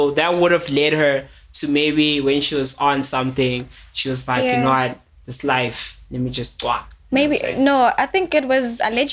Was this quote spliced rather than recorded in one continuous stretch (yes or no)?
no